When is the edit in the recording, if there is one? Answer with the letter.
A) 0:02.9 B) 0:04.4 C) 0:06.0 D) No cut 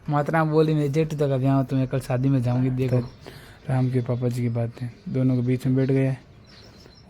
A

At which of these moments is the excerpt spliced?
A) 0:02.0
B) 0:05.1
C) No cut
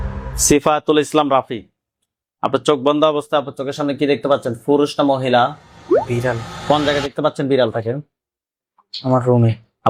C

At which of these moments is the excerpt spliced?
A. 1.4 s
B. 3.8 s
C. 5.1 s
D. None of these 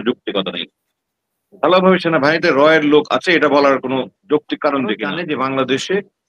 C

